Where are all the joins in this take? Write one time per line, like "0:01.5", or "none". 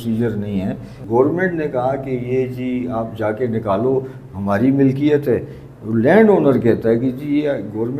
0:01.0